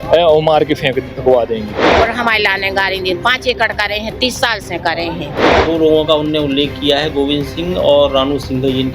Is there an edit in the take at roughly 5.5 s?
yes; 2 cuts; at 2.0 s, 5.5 s

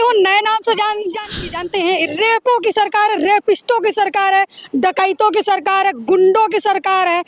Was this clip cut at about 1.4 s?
yes; 1 cut; at 1.4 s

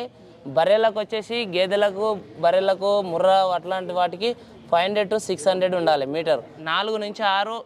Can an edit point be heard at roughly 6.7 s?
yes; 1 cut; at 6.7 s

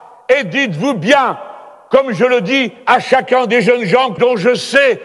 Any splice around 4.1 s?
yes; 1 cut; at 4.1 s

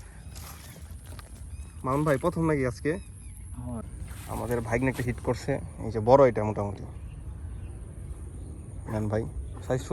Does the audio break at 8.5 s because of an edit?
no; 1 cut; at 3.8 s

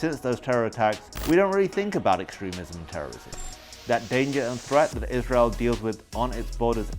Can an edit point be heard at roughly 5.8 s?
no; 2 cuts; at 1.1 s, 3.4 s

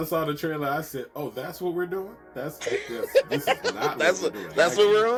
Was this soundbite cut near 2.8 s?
no; 0 cuts

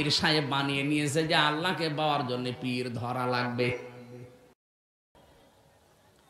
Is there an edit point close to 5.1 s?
yes; 1 cut; at 5.1 s

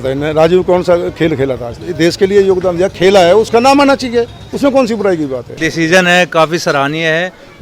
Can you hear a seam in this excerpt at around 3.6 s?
no; 2 cuts; at 1.8 s, 5.6 s

